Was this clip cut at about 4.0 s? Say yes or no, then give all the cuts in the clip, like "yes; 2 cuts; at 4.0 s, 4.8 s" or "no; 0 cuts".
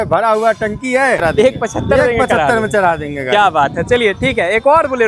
no; 1 cut; at 1.2 s